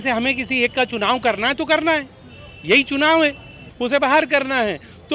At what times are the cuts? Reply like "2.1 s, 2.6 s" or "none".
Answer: 3.7 s